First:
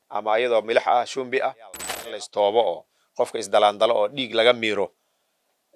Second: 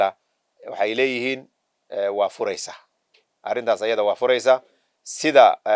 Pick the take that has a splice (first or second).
first